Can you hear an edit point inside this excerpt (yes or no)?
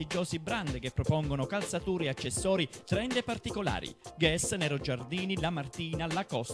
no